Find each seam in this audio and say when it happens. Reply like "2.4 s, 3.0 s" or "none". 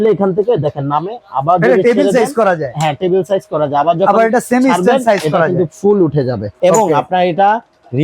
6.5 s